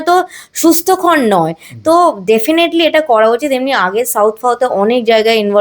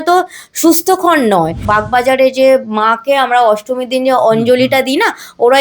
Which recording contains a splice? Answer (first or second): second